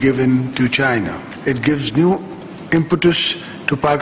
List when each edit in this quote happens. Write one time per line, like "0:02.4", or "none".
0:01.2

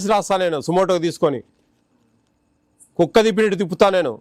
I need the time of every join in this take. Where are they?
none

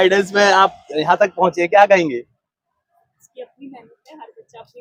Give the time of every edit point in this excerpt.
none

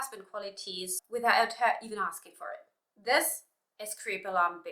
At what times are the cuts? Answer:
0:00.9

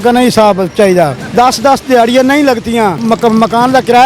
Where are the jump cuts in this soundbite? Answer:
0:01.2
0:03.0

